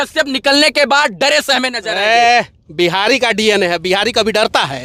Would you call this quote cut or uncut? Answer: uncut